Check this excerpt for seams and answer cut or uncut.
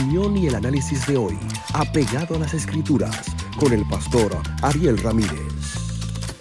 uncut